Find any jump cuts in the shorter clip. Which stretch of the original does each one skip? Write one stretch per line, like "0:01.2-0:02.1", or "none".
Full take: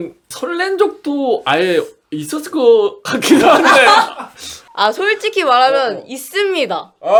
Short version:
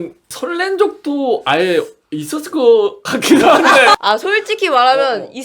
0:03.9-0:04.7